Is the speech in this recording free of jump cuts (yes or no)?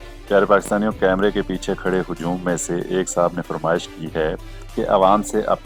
yes